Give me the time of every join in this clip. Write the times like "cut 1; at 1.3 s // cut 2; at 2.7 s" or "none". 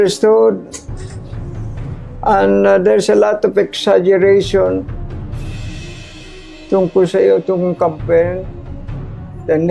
none